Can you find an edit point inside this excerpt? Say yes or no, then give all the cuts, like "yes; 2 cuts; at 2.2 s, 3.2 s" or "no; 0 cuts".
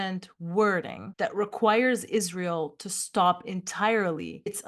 no; 0 cuts